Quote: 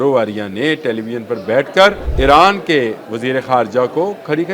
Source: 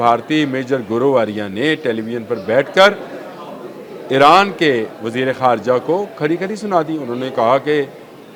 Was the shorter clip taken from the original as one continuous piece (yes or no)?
no